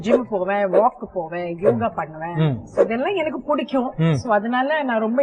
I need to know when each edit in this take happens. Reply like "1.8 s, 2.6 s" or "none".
none